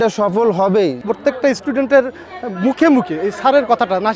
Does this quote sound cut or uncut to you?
cut